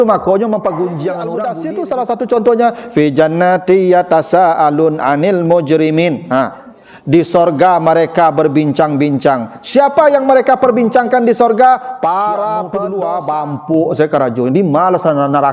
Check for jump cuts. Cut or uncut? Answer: cut